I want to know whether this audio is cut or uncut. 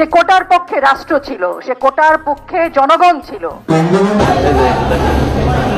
cut